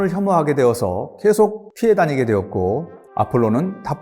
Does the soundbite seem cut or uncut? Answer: cut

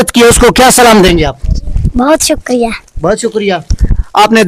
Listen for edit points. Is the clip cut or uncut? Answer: uncut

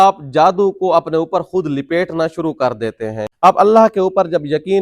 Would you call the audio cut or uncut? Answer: cut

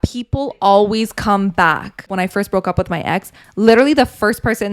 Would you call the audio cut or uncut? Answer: cut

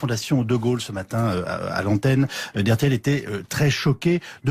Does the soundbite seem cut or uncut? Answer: uncut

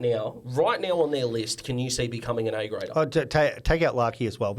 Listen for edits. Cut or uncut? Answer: uncut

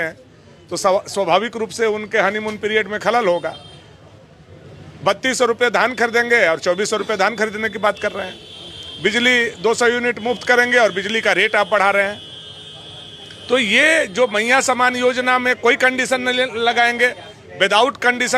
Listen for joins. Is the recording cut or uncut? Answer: uncut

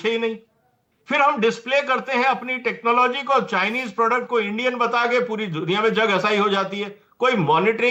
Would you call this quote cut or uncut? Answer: uncut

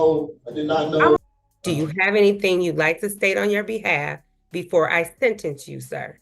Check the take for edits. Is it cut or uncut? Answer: cut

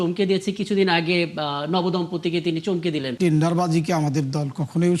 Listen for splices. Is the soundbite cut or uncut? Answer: cut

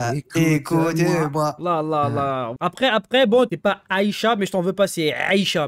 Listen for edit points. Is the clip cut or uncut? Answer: cut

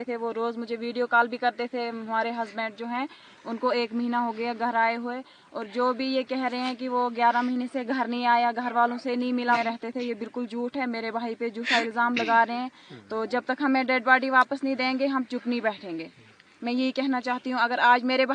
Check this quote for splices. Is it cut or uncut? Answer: cut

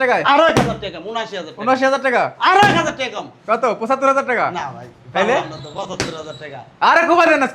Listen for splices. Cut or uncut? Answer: uncut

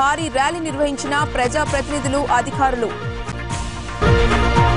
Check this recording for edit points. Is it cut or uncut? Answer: uncut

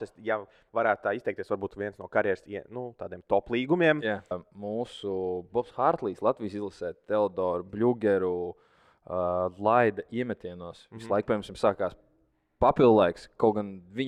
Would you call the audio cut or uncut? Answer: cut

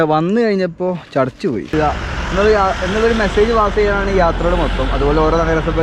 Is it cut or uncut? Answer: cut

